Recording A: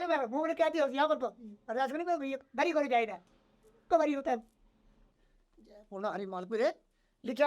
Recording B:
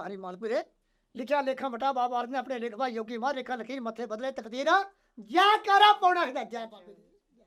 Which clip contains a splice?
A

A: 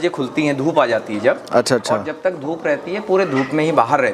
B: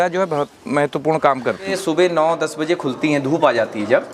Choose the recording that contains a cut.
B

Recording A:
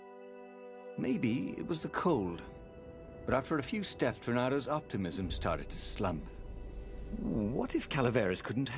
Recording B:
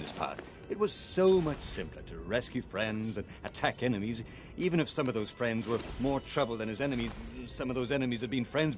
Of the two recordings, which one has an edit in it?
A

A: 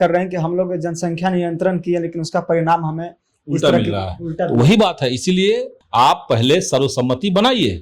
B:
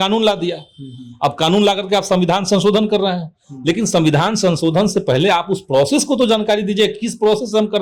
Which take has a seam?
A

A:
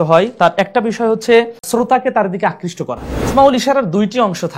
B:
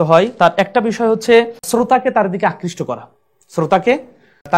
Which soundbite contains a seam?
A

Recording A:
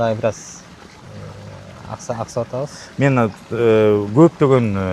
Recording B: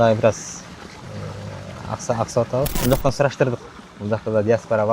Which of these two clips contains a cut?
B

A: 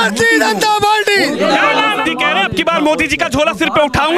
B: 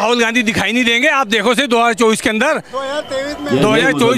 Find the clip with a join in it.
A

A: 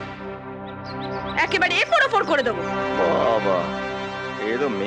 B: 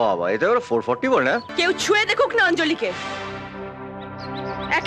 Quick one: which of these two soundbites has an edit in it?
B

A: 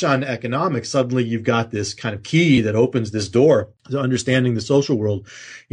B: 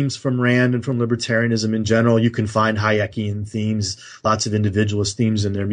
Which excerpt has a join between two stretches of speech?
A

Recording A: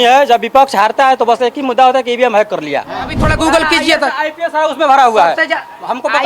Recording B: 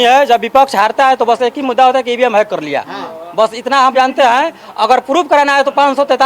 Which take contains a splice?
A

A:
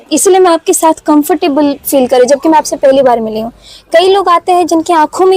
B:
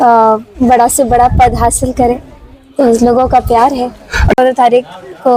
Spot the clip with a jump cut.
B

